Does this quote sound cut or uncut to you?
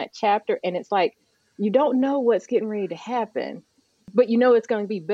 cut